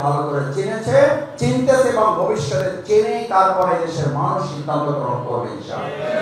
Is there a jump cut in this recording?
no; 0 cuts

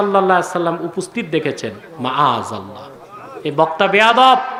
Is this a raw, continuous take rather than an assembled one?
yes; 0 cuts

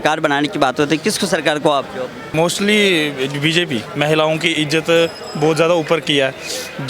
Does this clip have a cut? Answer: yes; 2 cuts; at 2.2 s, 3.9 s

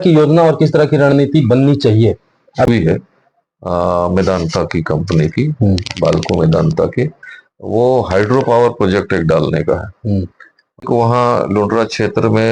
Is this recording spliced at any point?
yes; 2 cuts; at 2.7 s, 10.8 s

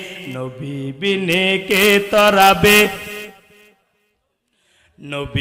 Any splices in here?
no; 0 cuts

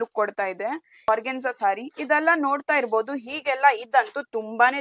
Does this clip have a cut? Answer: yes; 1 cut; at 1.1 s

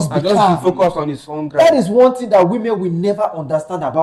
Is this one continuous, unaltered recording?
yes; 0 cuts

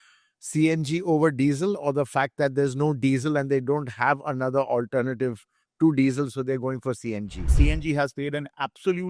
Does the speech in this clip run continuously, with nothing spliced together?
no; 1 cut; at 7.5 s

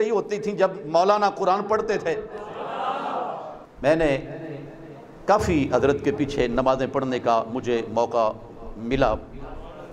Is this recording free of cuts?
no; 1 cut; at 3.6 s

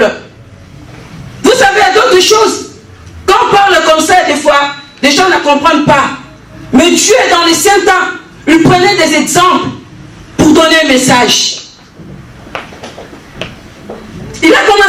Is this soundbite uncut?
yes; 0 cuts

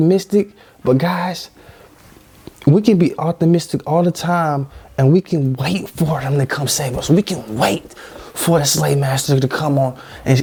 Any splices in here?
no; 0 cuts

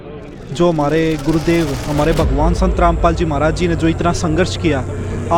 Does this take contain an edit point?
no; 0 cuts

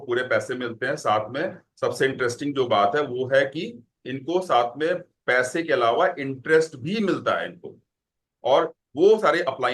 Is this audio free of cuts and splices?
yes; 0 cuts

